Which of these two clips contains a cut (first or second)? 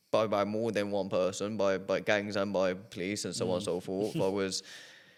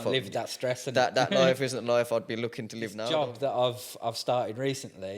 second